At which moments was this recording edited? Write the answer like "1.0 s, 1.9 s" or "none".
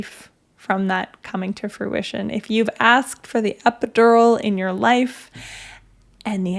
none